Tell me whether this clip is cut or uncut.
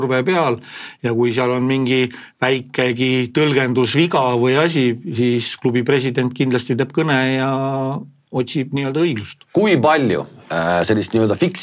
cut